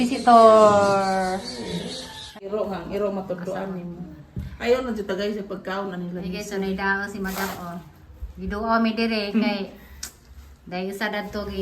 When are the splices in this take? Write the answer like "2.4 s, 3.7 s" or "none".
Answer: 2.3 s